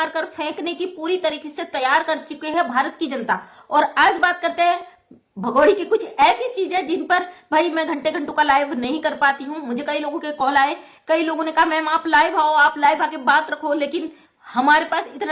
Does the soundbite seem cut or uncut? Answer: uncut